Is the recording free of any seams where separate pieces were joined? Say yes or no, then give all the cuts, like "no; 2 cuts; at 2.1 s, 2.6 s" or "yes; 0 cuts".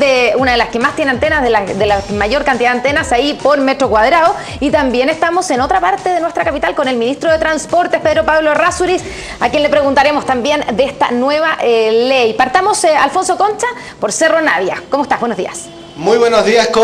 yes; 0 cuts